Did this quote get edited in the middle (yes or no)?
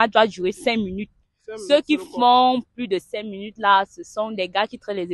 no